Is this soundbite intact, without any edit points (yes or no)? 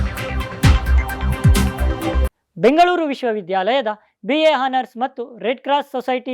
no